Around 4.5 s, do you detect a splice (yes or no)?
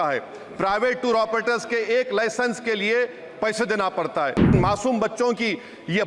yes